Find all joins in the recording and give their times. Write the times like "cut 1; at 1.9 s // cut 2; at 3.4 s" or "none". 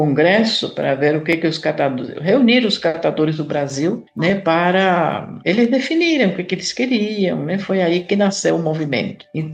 none